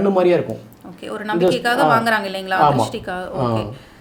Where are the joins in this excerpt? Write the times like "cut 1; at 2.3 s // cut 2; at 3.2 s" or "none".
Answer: none